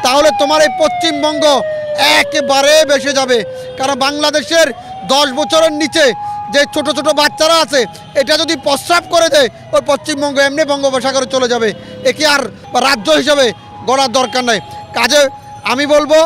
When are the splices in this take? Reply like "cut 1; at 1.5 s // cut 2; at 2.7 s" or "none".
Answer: cut 1; at 12.6 s